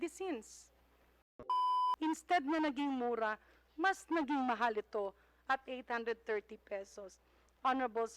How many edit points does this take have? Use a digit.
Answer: 1